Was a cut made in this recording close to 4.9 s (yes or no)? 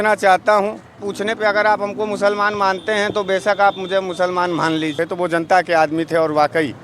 yes